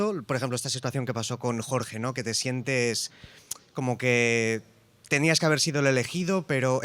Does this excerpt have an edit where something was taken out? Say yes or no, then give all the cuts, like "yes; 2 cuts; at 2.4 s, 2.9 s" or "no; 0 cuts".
no; 0 cuts